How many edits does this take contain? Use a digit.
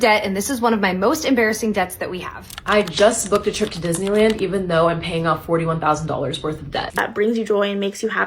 2